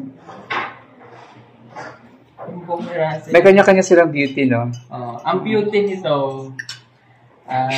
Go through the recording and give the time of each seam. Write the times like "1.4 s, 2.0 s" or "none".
none